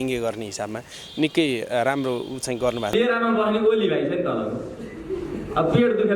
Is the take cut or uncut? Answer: cut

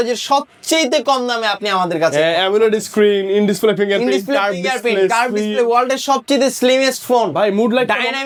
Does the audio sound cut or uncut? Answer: uncut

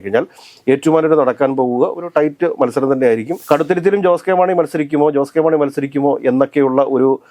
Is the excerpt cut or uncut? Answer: cut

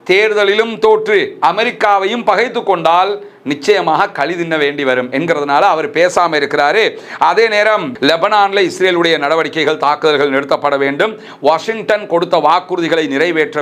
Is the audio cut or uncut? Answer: cut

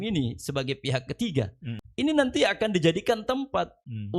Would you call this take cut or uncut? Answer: cut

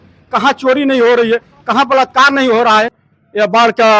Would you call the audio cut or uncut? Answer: cut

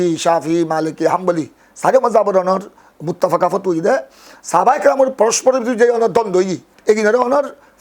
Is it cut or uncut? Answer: cut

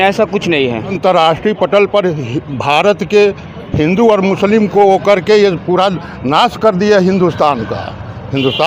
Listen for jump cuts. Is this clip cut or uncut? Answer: cut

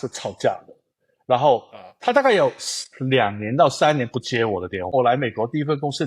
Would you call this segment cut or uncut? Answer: cut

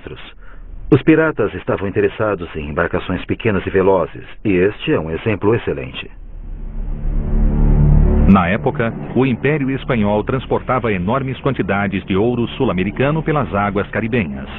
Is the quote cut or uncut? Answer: uncut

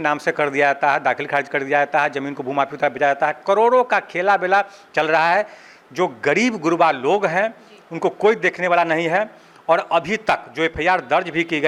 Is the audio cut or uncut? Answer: uncut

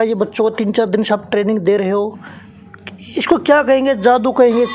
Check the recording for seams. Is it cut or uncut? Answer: uncut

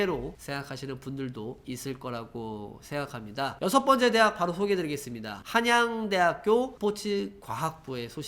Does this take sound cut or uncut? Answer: uncut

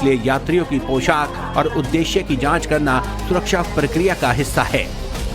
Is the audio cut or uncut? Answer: cut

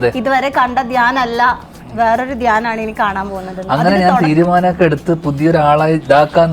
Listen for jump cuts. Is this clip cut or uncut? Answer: uncut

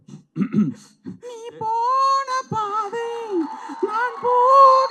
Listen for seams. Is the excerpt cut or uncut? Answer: uncut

